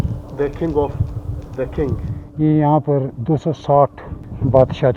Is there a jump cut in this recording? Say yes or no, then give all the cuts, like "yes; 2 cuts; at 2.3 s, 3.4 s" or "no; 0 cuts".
yes; 1 cut; at 2.2 s